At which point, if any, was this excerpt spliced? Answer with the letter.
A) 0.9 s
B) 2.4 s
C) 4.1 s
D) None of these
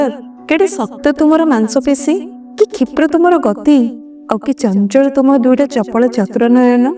D